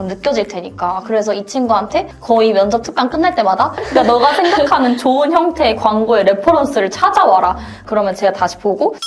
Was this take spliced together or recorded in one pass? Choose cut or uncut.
cut